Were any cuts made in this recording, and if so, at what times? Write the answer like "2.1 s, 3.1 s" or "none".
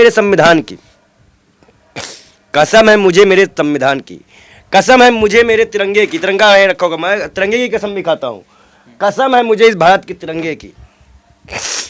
none

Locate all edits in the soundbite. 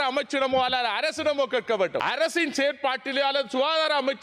2.0 s

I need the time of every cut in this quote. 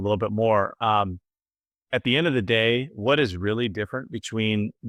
none

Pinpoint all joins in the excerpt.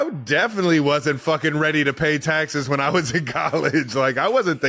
none

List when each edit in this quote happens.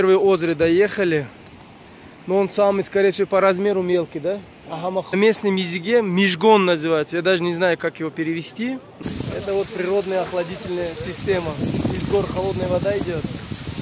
5.1 s, 9.0 s

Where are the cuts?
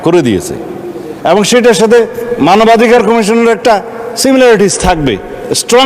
none

